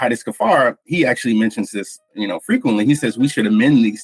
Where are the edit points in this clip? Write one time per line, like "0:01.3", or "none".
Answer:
none